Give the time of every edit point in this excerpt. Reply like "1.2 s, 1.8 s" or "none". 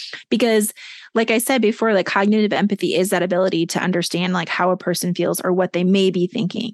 none